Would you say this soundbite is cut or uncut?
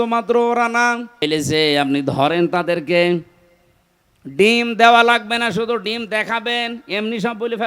cut